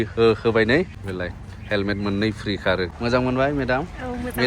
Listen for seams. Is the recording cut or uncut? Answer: cut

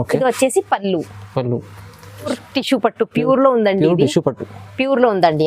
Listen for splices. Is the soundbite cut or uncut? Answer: cut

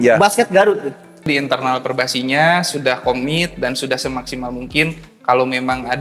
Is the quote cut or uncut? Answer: cut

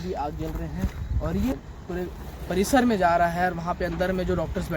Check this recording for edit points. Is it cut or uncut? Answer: cut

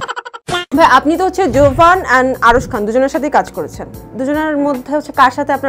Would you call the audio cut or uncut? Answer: uncut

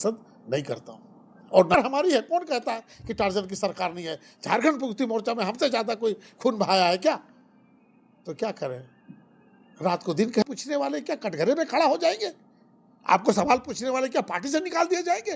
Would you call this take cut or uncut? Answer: cut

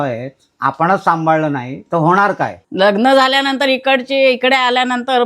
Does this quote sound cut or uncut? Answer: cut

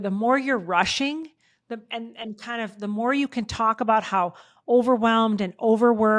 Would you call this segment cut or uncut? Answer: uncut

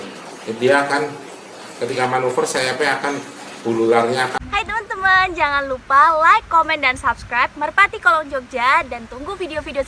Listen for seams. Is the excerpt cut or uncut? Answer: cut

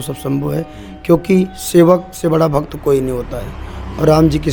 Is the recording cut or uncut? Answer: uncut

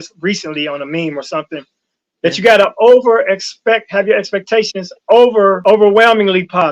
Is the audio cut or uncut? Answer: cut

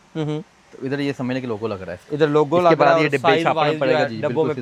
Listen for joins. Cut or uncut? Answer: uncut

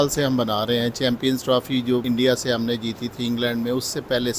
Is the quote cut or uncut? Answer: cut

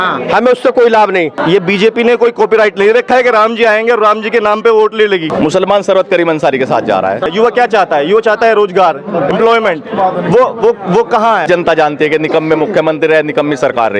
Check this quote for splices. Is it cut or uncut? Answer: cut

